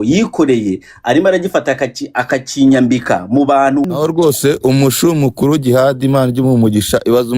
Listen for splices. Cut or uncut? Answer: cut